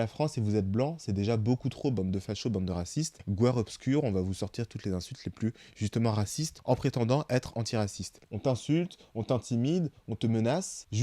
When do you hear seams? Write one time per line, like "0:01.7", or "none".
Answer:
0:08.2